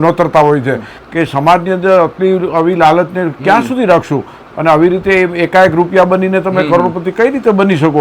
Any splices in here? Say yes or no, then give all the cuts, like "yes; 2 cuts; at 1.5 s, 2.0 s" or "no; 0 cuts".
yes; 1 cut; at 0.9 s